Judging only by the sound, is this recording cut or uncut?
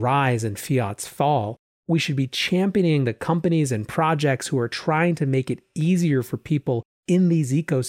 uncut